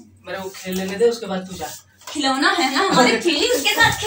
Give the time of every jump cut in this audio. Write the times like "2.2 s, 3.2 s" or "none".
none